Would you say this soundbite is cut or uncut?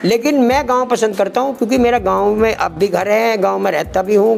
uncut